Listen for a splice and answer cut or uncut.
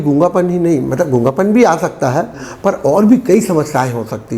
uncut